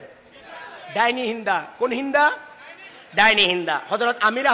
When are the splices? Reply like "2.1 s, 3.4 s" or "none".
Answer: none

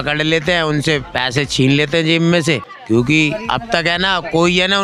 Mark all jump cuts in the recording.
2.7 s

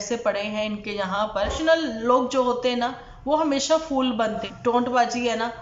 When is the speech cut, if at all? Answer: 1.6 s, 4.5 s

